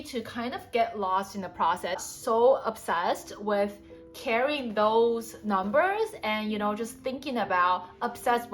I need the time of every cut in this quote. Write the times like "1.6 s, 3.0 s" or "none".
2.1 s